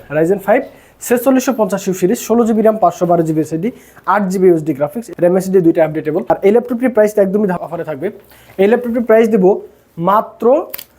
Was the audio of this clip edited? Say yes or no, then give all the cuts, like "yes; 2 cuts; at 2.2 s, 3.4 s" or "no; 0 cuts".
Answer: yes; 2 cuts; at 6.2 s, 7.6 s